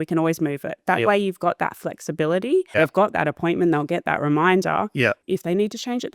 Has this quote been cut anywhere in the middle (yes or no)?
yes